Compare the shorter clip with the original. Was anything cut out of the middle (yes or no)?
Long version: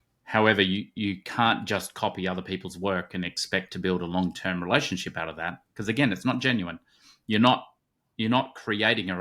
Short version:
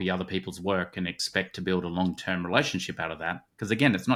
no